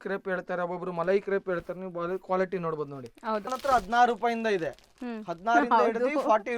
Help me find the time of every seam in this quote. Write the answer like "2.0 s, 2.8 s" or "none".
3.5 s